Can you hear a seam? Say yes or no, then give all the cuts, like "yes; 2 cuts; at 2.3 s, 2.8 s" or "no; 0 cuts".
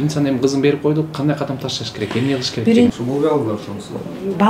yes; 1 cut; at 2.9 s